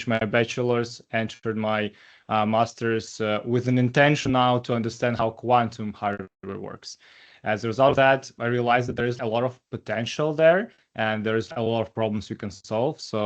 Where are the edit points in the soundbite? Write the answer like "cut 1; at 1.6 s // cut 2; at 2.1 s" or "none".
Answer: cut 1; at 9.2 s // cut 2; at 11.5 s